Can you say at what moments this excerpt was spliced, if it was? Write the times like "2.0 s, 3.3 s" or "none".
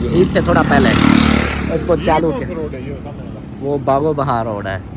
none